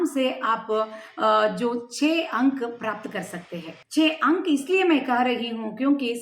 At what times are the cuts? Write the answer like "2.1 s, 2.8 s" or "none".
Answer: 3.8 s